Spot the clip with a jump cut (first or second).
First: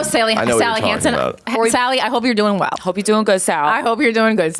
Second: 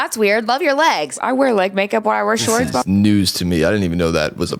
second